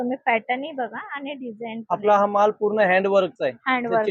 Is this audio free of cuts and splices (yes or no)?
yes